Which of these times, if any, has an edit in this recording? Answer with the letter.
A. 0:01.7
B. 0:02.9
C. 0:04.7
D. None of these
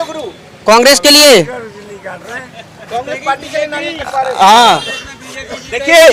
D